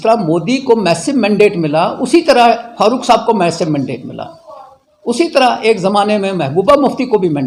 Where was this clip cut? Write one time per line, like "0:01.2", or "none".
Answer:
none